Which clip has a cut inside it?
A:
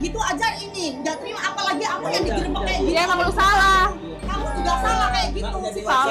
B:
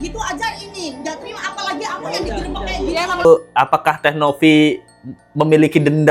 B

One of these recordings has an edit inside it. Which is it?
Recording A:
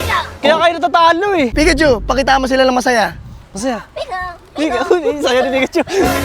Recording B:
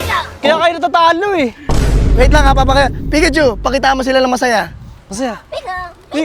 A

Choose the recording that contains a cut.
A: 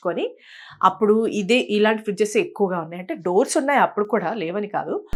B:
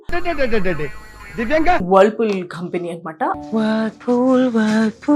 B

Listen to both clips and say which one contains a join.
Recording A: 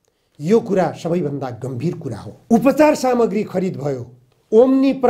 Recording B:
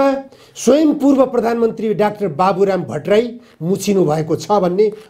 A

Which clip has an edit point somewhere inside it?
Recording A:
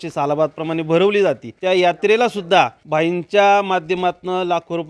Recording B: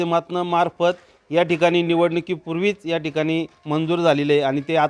A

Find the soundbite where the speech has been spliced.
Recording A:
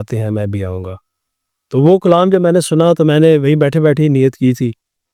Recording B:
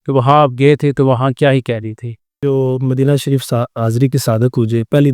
B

